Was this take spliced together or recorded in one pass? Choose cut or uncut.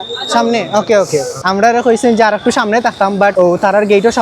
cut